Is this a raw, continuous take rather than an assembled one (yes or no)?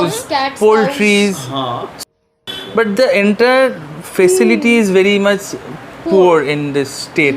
no